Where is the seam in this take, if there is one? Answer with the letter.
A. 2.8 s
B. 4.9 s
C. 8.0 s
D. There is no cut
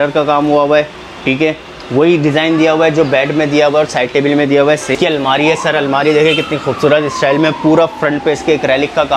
B